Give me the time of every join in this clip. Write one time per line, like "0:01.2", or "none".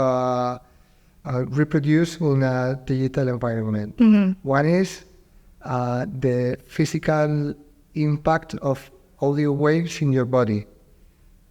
none